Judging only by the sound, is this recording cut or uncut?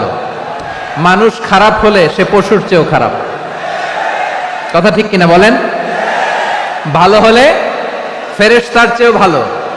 uncut